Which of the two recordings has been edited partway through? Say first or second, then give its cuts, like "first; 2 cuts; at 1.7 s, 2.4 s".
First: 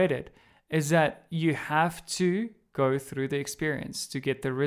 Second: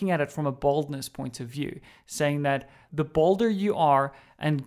second; 1 cut; at 2.8 s